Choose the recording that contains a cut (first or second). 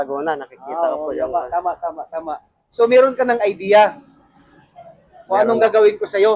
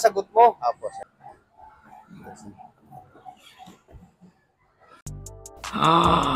second